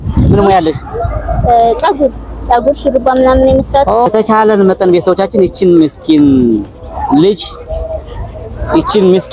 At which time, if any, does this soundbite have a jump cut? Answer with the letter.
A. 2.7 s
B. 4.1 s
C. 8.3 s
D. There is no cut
B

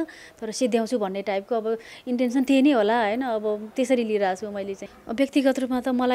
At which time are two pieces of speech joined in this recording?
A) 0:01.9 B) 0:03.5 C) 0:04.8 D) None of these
C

